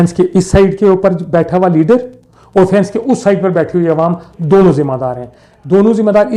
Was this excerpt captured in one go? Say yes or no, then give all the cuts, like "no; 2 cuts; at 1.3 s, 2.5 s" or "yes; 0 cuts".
yes; 0 cuts